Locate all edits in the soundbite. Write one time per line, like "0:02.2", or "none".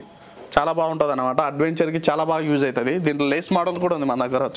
none